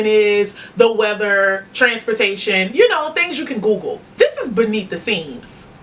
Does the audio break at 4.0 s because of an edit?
yes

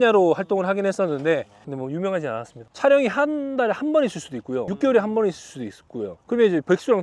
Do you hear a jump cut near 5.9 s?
no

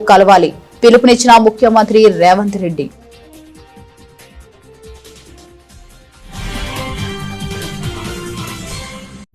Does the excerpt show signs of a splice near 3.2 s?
yes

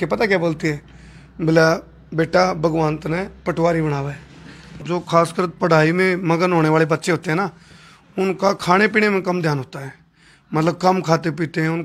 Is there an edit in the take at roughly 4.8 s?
yes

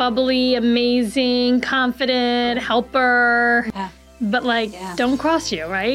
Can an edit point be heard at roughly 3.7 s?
yes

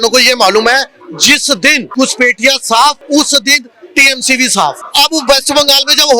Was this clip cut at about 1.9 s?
yes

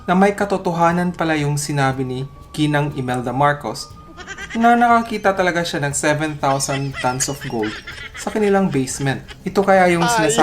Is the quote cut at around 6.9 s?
no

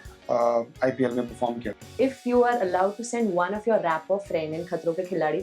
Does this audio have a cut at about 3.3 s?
no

